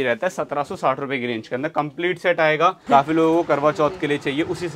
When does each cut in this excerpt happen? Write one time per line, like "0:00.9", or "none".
0:02.8